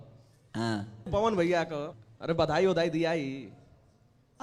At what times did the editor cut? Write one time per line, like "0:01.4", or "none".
0:01.1
0:01.9